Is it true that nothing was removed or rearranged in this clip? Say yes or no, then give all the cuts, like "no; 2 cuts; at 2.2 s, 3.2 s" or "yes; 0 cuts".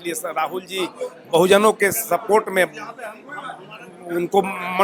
yes; 0 cuts